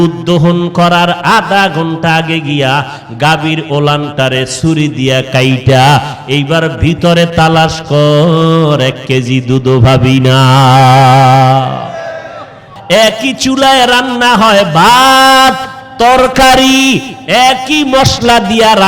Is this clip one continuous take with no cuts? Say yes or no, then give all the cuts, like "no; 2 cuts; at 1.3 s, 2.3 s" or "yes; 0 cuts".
no; 1 cut; at 12.7 s